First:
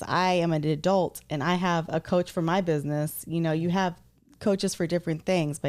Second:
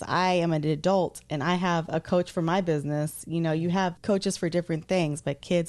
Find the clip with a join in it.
second; 1 cut; at 4.0 s

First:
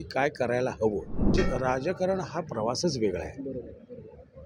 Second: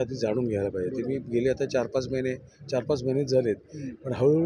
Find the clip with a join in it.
first; 1 cut; at 1.3 s

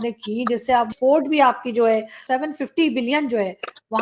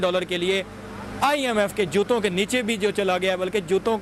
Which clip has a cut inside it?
first; 2 cuts; at 0.9 s, 2.2 s

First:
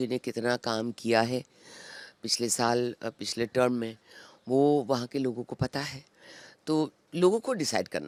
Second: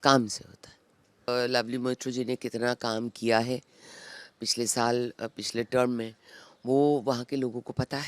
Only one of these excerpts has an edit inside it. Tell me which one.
second; 1 cut; at 1.3 s

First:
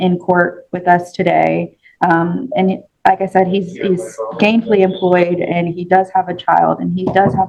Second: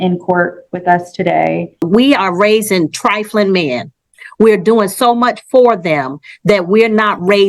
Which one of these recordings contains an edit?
second; 1 cut; at 1.8 s

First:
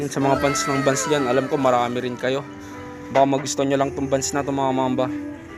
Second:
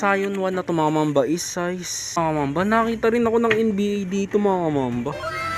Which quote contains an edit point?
second; 1 cut; at 2.2 s

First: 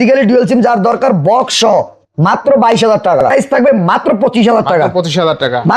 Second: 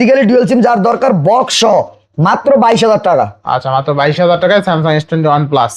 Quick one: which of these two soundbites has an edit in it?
first; 1 cut; at 3.3 s

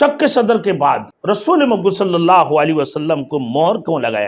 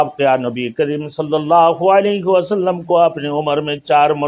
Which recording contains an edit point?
first; 1 cut; at 1.1 s

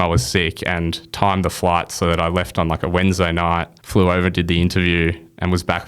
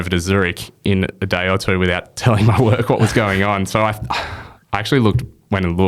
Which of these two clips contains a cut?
first; 1 cut; at 3.8 s

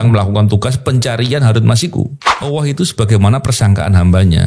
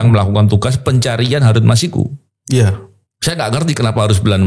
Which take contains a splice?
first; 1 cut; at 2.3 s

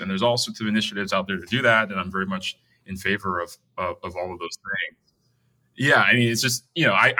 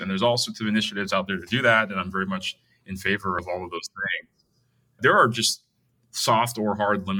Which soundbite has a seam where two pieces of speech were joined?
second; 2 cuts; at 3.4 s, 5.0 s

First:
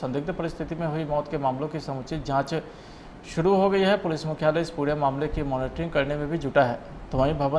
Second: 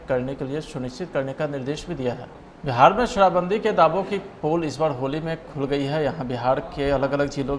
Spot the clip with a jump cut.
second; 1 cut; at 2.6 s

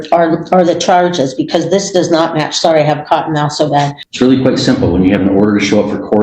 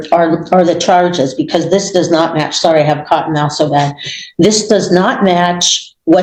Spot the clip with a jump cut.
first; 1 cut; at 4.0 s

